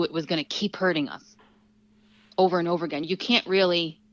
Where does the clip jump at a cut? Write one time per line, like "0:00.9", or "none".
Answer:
none